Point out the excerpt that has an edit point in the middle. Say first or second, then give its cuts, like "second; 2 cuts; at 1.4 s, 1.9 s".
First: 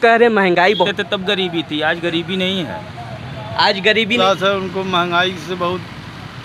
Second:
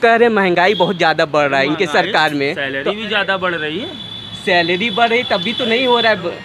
first; 2 cuts; at 0.9 s, 4.2 s